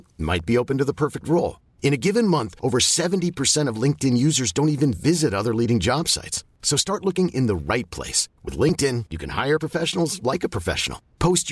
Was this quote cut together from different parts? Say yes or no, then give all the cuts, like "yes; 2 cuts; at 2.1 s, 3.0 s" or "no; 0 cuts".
no; 0 cuts